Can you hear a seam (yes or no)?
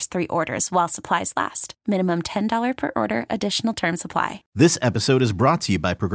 yes